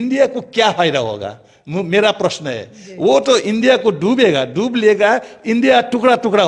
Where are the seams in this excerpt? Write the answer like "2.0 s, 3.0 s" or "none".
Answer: none